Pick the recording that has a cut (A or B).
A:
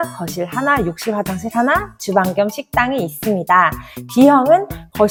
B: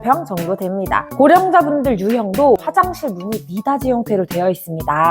B